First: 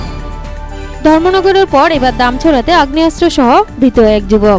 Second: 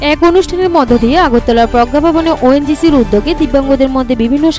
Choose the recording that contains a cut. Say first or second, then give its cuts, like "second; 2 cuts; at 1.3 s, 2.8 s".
first; 1 cut; at 0.9 s